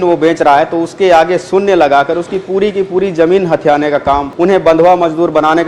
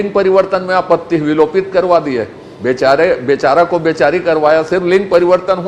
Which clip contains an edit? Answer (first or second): first